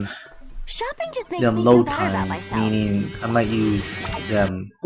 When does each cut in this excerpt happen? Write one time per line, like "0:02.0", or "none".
0:01.5